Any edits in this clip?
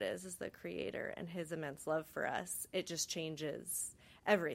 no; 0 cuts

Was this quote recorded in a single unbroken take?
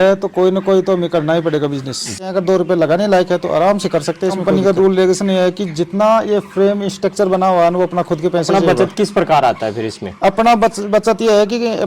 no; 3 cuts; at 2.3 s, 4.4 s, 8.5 s

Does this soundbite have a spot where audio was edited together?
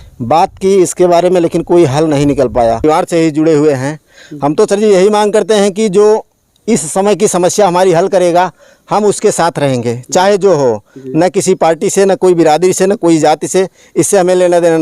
yes; 1 cut; at 2.8 s

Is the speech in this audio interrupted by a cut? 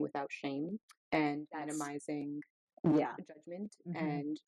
no; 0 cuts

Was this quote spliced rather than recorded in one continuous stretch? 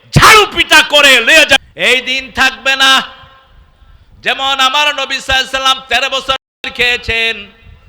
yes; 1 cut; at 1.6 s

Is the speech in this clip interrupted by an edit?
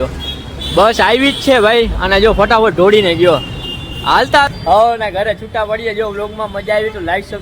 yes; 1 cut; at 4.5 s

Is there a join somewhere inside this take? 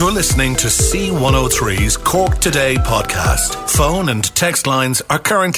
no; 0 cuts

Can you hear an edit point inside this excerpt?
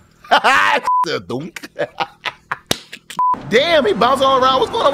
yes; 1 cut; at 3.3 s

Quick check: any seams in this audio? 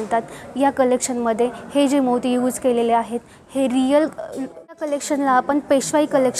yes; 1 cut; at 4.8 s

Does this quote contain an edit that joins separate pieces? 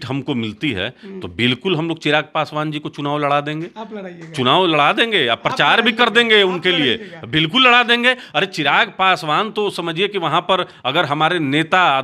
no; 0 cuts

